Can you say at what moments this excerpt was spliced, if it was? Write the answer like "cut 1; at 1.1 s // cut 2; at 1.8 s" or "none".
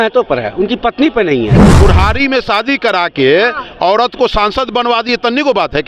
cut 1; at 1.7 s